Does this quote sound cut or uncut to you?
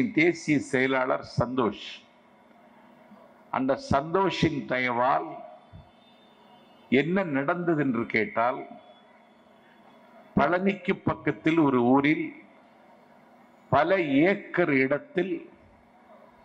uncut